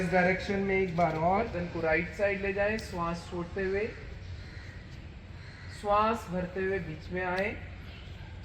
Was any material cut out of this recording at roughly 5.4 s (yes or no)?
no